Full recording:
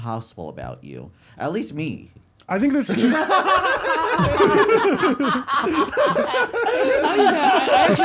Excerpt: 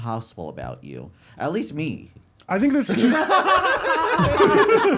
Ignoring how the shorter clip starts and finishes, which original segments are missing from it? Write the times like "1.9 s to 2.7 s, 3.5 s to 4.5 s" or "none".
none